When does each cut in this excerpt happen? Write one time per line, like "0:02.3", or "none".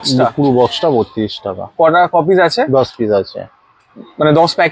none

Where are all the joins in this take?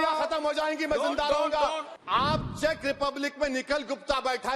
0:01.9

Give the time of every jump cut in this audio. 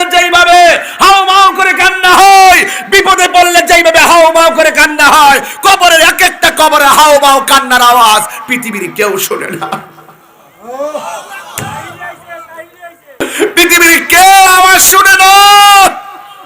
0:13.2

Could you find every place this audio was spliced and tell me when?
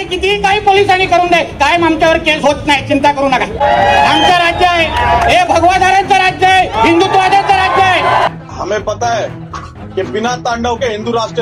none

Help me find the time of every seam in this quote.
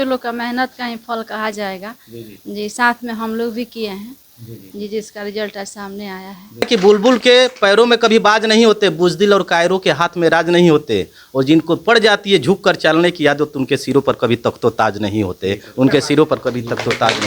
0:06.6

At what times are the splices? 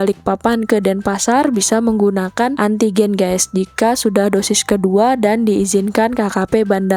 none

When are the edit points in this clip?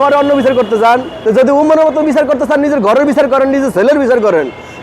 0:01.1

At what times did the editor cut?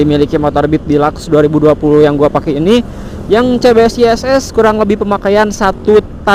none

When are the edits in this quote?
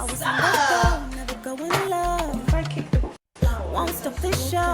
0:03.2

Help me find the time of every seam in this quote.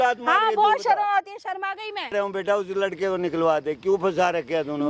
0:02.1

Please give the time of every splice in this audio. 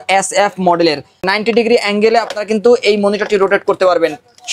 0:01.2

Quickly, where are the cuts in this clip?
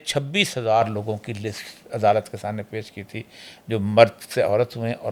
none

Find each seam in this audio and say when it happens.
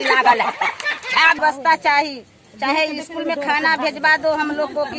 0:01.4

